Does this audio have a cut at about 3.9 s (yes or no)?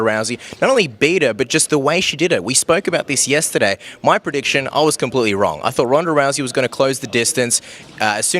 no